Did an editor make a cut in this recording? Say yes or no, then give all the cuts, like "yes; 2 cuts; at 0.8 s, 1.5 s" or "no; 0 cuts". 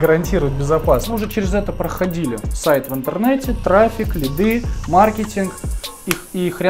yes; 1 cut; at 1.1 s